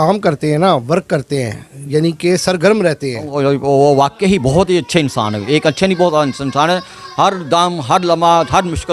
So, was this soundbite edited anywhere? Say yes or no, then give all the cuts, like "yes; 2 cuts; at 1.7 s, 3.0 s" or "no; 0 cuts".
yes; 1 cut; at 3.3 s